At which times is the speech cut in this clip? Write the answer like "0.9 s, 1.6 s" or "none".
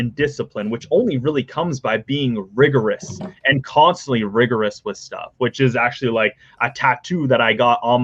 none